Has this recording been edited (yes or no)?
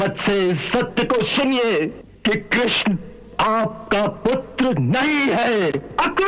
yes